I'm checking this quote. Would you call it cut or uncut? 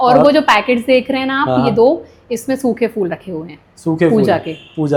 uncut